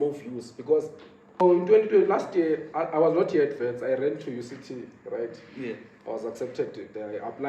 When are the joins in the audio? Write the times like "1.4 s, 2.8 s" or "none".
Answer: 1.4 s